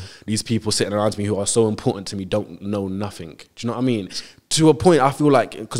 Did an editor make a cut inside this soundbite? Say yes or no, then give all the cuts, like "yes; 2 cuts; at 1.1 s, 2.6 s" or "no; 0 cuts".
no; 0 cuts